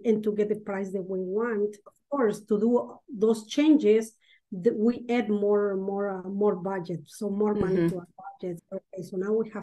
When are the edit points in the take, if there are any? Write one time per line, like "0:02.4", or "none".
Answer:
0:01.9
0:08.5

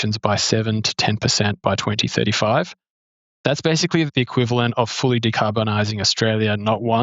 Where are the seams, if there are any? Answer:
0:04.1

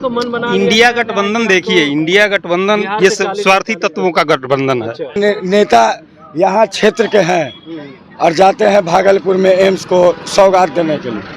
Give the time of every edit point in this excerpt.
0:05.2

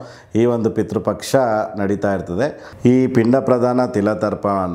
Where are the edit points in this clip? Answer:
0:02.7

